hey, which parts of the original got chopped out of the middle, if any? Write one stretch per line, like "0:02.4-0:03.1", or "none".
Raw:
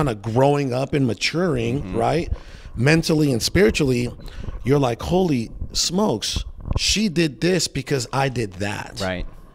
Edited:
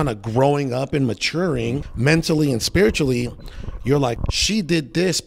0:01.8-0:02.6
0:05.0-0:06.7